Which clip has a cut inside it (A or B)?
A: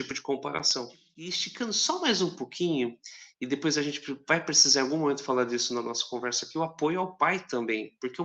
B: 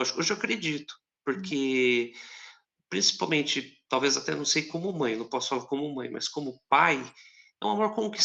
A